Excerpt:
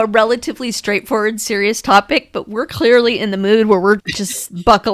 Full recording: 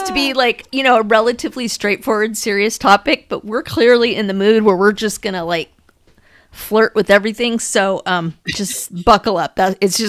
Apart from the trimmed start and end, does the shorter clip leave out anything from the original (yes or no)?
yes